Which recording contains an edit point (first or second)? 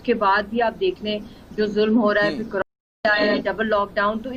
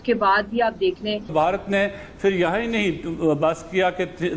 second